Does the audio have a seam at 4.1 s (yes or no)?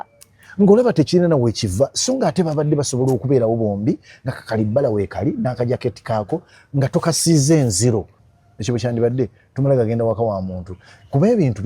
no